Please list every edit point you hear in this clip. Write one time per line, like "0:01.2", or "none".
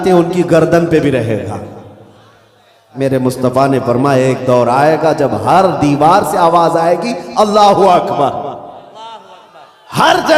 0:02.9

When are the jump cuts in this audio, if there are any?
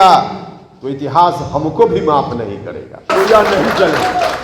0:03.1

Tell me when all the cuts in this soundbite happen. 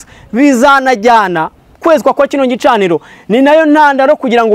0:01.8

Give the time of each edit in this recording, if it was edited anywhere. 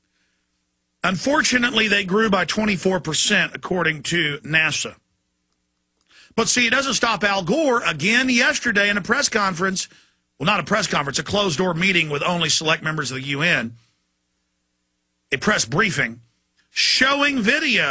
none

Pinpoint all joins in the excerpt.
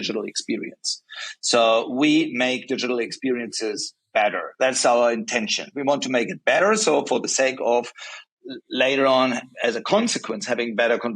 none

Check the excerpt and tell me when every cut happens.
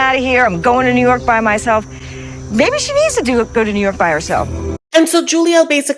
none

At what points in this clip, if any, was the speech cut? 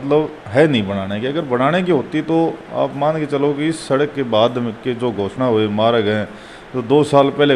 none

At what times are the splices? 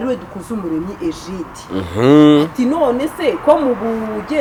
none

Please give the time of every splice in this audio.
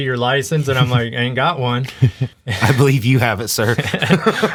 none

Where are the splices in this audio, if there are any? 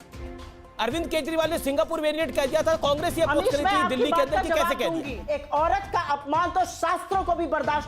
0:05.2

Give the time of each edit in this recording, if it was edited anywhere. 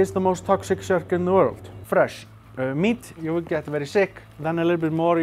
0:01.8
0:03.2
0:04.2

